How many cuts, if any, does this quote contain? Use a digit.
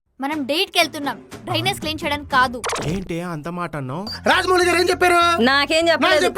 1